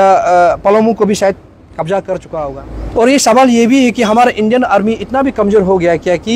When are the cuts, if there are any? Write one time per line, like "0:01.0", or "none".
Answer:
0:02.4

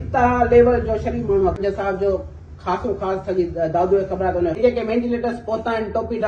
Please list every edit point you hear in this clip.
0:01.6
0:04.6

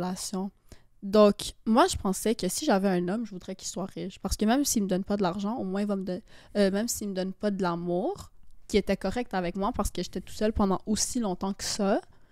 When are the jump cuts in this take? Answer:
none

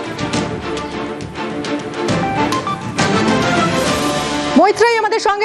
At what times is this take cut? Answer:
0:04.5

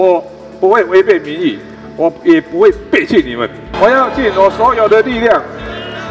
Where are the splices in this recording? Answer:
0:03.7

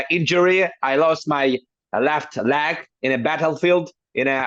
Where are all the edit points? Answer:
none

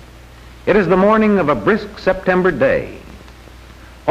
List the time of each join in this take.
0:01.9

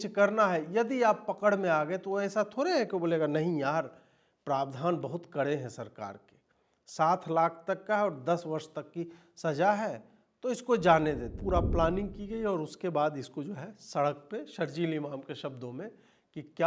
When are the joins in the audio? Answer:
0:11.4

